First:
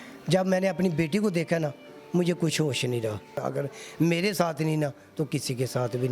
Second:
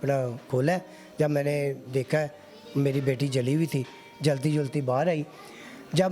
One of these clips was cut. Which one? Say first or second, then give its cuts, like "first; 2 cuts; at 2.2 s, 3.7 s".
first; 1 cut; at 3.4 s